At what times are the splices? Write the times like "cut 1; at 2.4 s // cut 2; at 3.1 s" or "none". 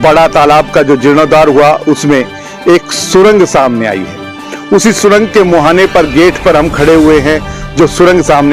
none